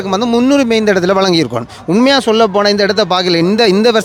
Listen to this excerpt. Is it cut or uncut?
uncut